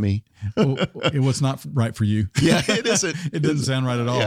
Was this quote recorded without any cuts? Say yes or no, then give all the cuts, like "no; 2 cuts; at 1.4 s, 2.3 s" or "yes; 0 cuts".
yes; 0 cuts